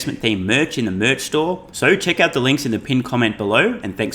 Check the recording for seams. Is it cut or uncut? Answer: cut